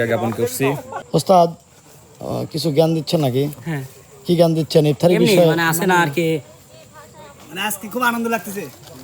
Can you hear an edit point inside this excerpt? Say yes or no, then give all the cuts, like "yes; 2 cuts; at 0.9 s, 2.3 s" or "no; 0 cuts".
yes; 1 cut; at 0.9 s